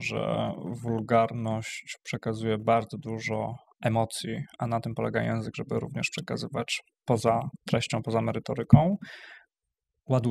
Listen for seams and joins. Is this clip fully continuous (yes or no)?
yes